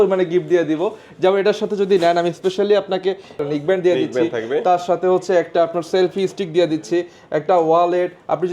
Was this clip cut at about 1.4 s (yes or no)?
no